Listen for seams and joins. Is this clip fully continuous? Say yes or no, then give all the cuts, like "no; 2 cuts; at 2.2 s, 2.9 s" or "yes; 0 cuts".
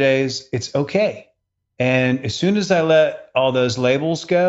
yes; 0 cuts